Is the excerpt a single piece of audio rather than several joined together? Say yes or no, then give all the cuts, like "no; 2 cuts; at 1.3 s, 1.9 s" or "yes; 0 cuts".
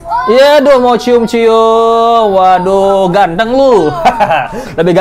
yes; 0 cuts